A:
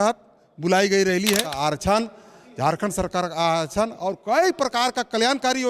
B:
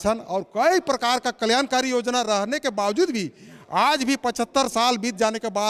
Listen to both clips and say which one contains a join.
A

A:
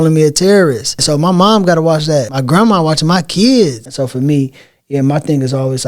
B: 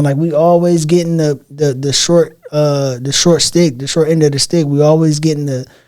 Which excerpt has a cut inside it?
A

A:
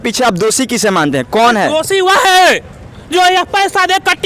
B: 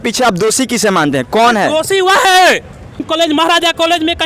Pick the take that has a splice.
B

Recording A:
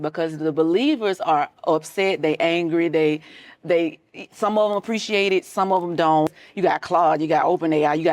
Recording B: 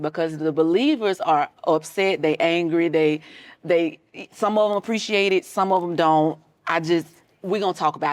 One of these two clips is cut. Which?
A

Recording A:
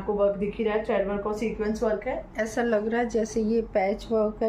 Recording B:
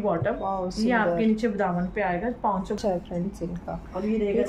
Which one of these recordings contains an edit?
B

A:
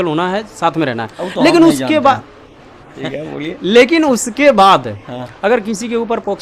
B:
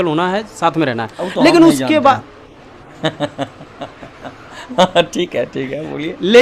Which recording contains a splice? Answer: A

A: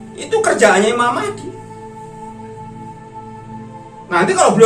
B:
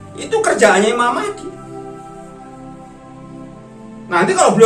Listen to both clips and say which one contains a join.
A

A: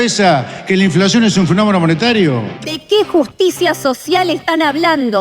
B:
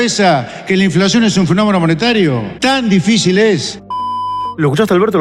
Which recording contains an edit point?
A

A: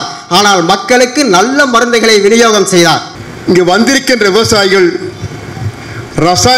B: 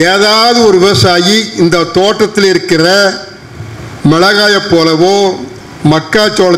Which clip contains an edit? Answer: A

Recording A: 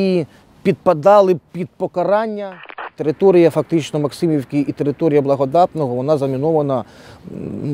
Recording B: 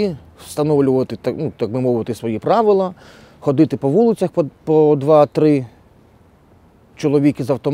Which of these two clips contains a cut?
A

